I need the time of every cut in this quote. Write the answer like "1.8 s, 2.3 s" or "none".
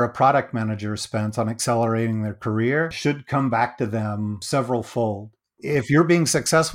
2.9 s, 4.4 s, 5.6 s